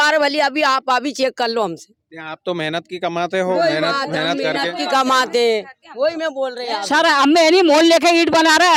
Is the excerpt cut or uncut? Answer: uncut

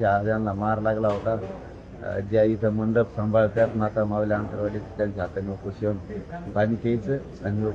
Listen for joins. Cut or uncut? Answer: uncut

